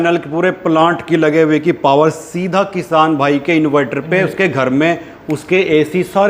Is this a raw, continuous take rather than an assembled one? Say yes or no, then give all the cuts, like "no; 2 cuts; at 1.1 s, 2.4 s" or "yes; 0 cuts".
yes; 0 cuts